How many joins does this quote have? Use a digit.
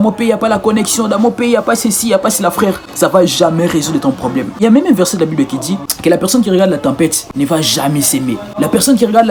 0